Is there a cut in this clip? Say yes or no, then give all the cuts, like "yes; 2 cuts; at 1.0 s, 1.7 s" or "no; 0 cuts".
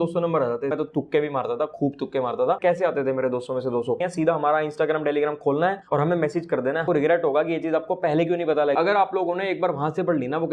yes; 5 cuts; at 0.7 s, 2.6 s, 4.0 s, 6.8 s, 8.8 s